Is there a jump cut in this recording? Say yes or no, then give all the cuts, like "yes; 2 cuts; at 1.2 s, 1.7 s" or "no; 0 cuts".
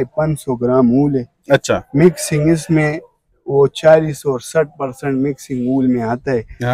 no; 0 cuts